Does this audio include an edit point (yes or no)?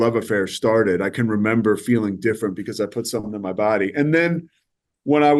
no